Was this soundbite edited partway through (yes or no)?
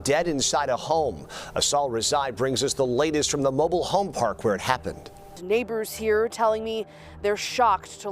yes